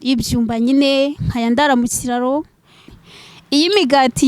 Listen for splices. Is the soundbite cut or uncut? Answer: cut